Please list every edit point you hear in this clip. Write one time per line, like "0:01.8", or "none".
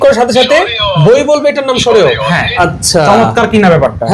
0:02.5